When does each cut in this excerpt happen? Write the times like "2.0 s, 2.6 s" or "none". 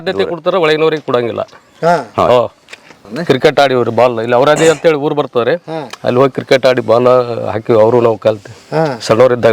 3.1 s